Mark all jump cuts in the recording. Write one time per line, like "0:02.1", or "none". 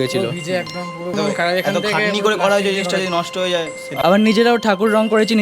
0:01.1
0:03.8

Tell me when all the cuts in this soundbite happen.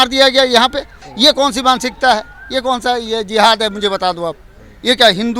0:01.0

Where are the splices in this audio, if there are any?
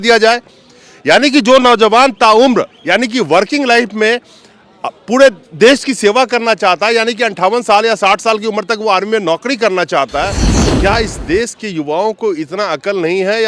0:10.5

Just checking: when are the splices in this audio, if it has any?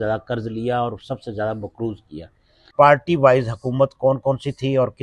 0:02.6

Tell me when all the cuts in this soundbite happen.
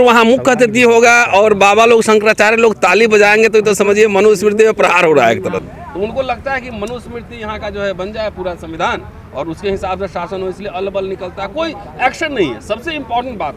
0:05.7

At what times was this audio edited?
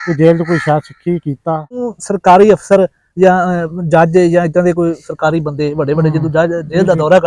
0:01.9

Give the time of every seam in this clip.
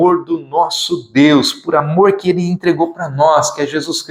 none

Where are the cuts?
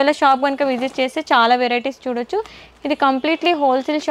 none

